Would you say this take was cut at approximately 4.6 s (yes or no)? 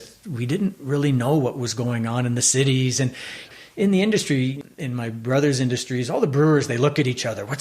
yes